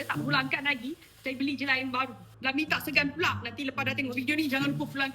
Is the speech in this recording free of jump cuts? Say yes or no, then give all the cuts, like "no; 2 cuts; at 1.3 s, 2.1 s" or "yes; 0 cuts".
yes; 0 cuts